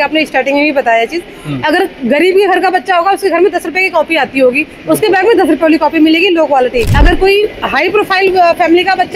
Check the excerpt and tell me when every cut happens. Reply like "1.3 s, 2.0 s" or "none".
none